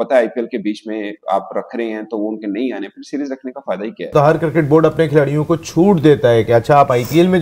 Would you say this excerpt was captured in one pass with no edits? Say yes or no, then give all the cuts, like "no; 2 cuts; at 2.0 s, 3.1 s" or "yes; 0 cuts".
no; 1 cut; at 4.1 s